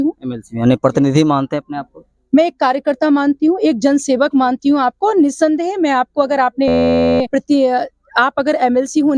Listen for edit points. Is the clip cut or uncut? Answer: uncut